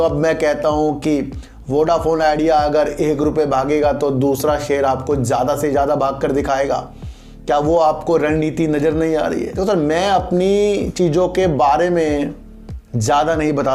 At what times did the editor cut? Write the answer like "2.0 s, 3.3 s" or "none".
9.5 s